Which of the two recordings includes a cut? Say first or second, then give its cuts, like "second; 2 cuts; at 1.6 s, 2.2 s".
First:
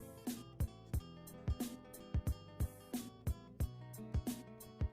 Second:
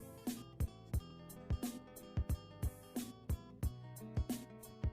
second; 2 cuts; at 1.1 s, 3.0 s